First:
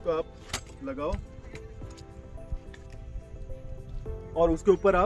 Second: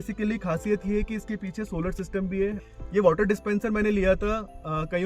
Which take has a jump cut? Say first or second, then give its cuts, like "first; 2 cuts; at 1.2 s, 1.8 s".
second; 1 cut; at 2.6 s